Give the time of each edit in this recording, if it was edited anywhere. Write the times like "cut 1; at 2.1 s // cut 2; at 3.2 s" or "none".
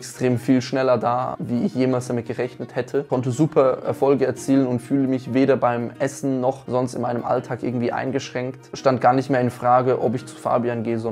cut 1; at 1.4 s // cut 2; at 3.1 s // cut 3; at 8.7 s